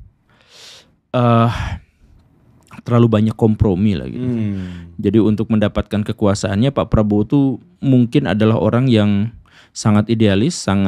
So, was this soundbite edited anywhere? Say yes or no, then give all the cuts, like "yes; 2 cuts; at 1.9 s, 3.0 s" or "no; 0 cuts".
no; 0 cuts